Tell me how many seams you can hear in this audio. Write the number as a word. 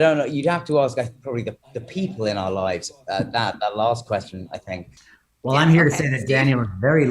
one